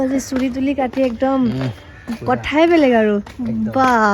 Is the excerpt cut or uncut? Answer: uncut